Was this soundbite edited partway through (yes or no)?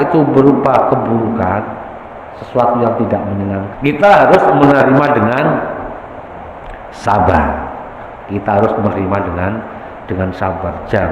yes